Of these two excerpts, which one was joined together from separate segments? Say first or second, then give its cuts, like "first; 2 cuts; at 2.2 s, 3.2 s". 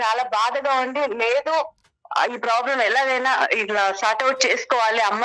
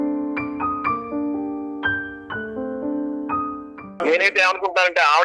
second; 1 cut; at 3.8 s